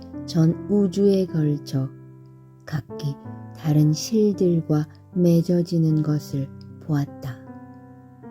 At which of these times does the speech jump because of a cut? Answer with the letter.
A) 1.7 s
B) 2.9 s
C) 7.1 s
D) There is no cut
C